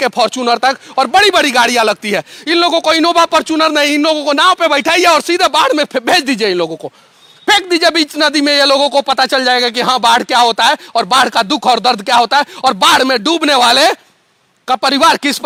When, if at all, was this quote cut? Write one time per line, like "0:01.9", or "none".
none